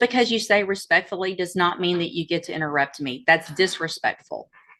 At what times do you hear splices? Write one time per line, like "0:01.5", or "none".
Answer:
none